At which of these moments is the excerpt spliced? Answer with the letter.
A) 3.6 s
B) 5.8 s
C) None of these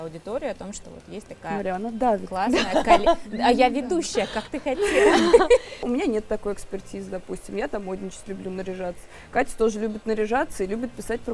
B